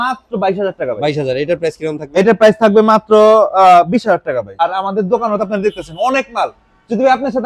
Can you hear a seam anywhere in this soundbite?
yes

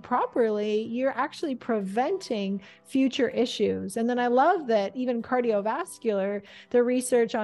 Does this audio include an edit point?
no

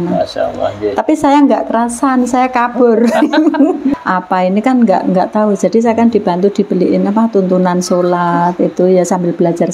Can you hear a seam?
yes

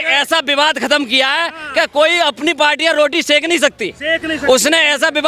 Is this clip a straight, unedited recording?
yes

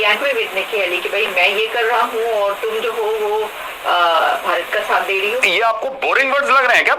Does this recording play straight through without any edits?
no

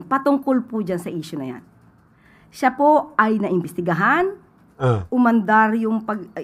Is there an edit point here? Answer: no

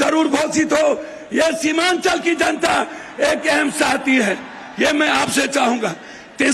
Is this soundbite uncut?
yes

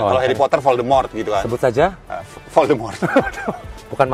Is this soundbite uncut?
yes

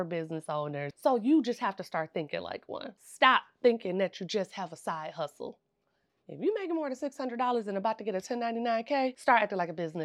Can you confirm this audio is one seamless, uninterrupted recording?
no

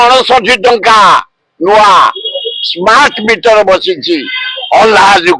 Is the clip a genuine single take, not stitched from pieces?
yes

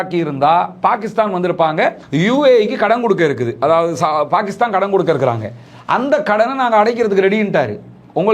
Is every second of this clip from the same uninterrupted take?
no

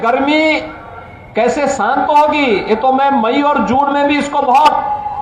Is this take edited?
no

